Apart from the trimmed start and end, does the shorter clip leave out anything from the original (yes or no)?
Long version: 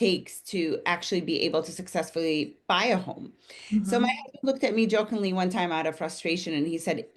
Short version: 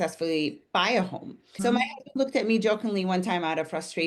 yes